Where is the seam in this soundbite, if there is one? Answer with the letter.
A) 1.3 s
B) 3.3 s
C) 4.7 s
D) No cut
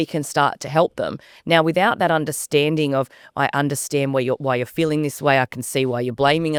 D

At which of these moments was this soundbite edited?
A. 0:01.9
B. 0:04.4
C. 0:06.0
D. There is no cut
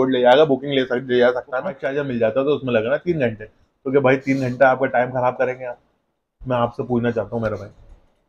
A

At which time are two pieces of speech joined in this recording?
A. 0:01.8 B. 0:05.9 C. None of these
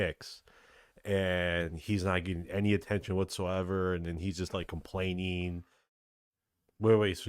B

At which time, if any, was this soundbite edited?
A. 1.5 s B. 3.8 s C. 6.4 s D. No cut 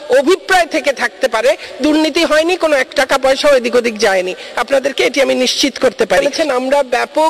C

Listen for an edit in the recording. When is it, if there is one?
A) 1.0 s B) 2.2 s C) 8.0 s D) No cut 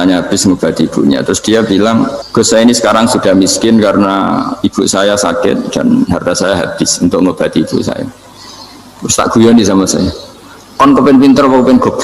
B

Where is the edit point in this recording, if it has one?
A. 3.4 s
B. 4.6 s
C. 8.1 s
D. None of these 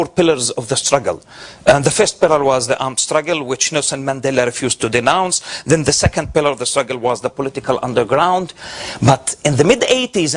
B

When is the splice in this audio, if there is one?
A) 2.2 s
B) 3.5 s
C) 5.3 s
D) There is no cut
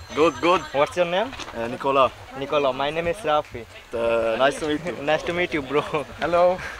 D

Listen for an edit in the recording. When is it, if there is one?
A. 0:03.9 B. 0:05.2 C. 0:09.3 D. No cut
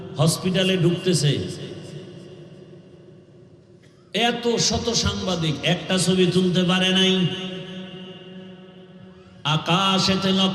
C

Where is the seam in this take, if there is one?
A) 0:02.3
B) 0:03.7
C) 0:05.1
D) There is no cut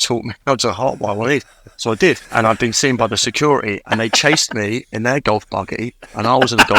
A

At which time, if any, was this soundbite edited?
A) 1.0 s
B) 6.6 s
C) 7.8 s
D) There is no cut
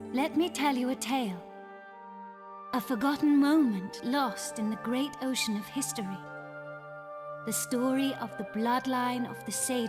D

